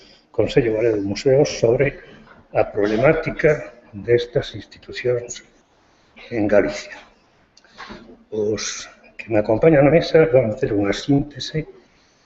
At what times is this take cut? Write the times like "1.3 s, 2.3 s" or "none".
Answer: none